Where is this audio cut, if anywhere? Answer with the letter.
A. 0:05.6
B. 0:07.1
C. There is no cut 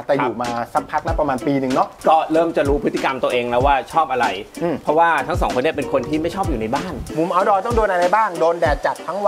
B